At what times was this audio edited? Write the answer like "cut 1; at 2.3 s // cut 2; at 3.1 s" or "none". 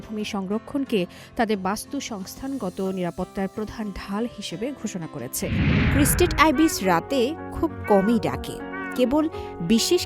cut 1; at 5.6 s

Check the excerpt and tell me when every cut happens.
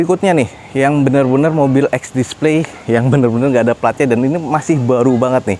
none

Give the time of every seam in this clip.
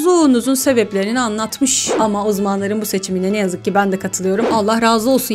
cut 1; at 1.9 s // cut 2; at 4.5 s

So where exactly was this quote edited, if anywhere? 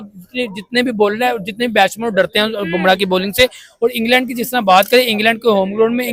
none

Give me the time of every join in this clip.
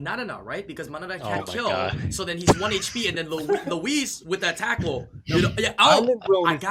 none

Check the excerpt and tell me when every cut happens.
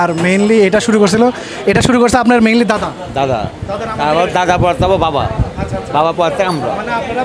none

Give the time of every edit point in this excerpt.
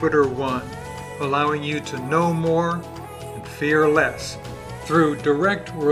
none

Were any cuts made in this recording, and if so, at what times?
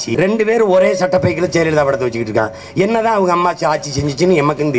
none

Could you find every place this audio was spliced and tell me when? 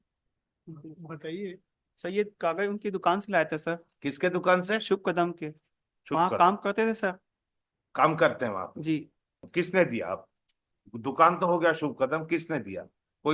cut 1; at 9.4 s

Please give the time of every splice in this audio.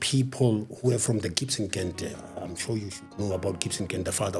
none

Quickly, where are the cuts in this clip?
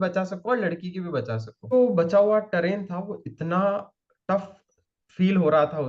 cut 1; at 1.7 s

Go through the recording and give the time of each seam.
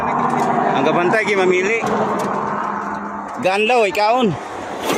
none

